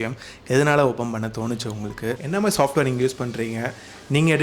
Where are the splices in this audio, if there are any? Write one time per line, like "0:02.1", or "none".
0:02.2